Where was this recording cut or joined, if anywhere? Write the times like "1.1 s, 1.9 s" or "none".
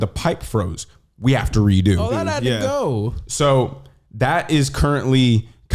none